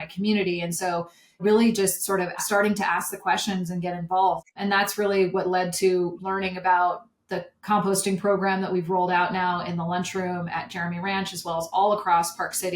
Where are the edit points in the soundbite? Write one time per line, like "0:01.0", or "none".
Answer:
0:01.4
0:02.4
0:04.4
0:06.2